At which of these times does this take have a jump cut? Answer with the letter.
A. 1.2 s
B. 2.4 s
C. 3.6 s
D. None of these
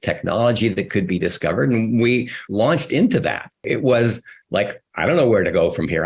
C